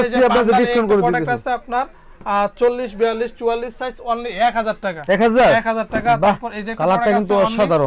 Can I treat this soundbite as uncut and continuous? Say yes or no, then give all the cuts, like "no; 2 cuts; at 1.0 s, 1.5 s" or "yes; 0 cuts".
yes; 0 cuts